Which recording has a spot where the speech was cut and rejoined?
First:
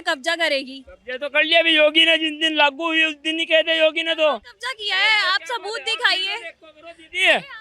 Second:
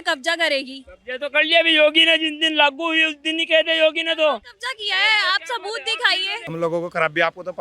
second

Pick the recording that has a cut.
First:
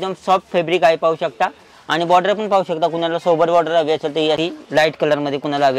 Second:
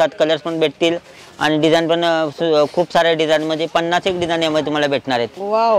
first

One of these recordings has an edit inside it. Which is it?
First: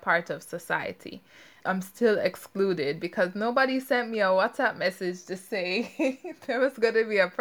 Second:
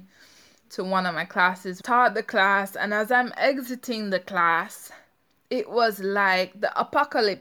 second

